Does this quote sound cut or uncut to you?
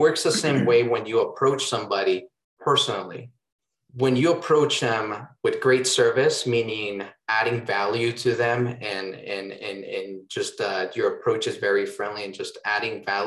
uncut